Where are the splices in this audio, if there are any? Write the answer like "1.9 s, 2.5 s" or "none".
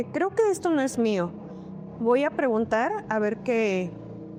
none